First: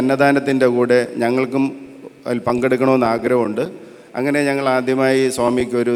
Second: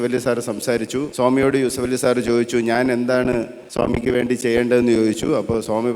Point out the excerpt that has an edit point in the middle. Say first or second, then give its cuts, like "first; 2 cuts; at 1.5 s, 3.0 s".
second; 2 cuts; at 1.1 s, 3.6 s